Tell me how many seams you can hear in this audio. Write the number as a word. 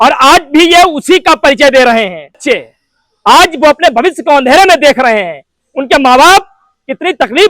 one